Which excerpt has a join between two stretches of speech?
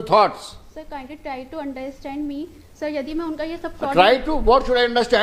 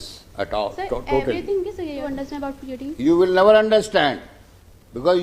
second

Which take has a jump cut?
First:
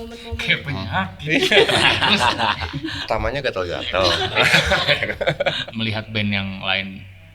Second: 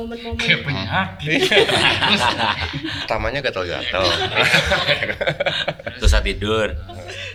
first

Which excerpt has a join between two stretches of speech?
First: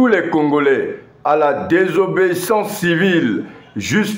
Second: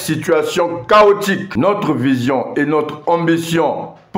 second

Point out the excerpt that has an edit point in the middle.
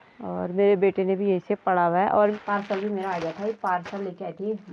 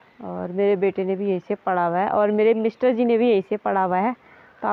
first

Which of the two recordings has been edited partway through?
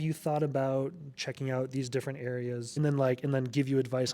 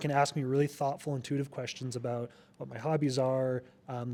first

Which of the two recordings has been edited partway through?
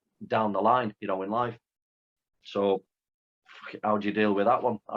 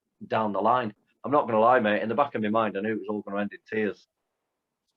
second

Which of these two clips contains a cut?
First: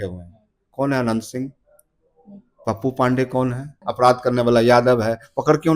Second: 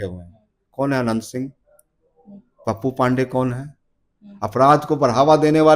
first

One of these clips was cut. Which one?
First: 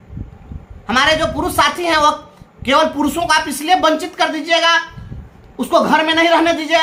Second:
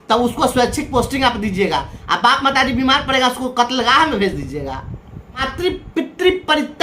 second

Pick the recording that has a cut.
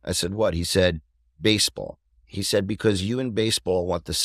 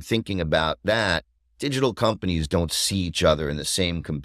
first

